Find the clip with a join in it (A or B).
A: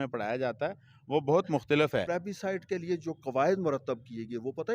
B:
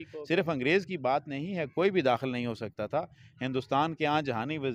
A